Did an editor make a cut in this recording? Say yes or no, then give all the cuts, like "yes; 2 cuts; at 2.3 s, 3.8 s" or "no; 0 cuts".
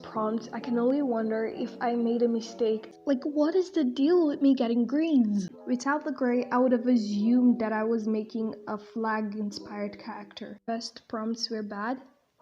yes; 3 cuts; at 2.9 s, 5.5 s, 10.7 s